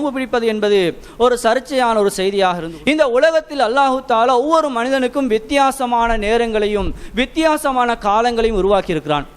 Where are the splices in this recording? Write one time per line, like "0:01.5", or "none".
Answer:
0:02.7